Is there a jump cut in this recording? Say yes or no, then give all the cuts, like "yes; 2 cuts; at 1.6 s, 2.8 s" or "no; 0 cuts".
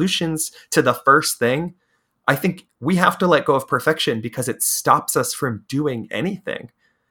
no; 0 cuts